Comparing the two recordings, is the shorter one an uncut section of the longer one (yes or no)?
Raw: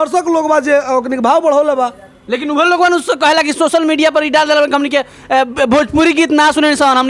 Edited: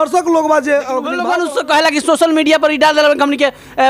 no